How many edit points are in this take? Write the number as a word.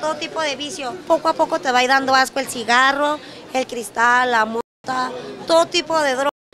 one